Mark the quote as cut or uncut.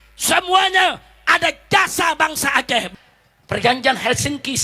cut